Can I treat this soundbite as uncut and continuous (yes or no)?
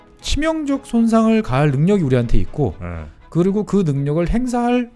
yes